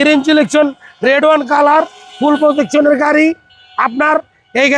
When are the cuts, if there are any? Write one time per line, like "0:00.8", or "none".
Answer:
none